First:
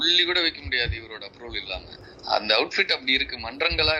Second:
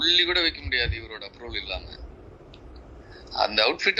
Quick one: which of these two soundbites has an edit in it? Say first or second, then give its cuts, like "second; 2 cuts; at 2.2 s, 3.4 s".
first; 1 cut; at 2.0 s